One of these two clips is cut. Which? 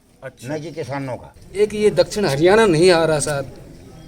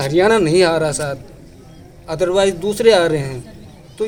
first; 1 cut; at 1.4 s

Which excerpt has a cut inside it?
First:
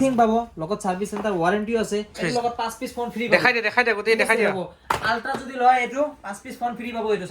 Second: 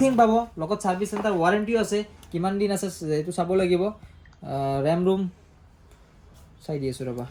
first; 1 cut; at 2.2 s

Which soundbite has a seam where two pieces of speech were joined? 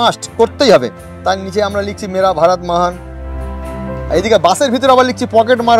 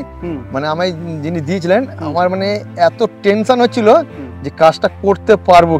first; 1 cut; at 1.1 s

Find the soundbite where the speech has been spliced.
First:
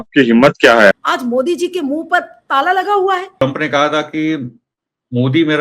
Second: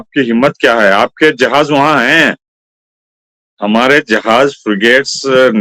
first; 2 cuts; at 0.9 s, 3.4 s

